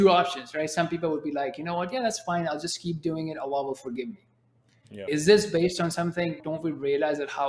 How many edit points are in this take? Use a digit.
2